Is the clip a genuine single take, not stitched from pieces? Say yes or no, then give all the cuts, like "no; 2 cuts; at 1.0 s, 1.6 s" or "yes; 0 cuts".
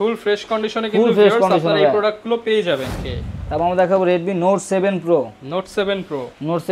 no; 1 cut; at 2.9 s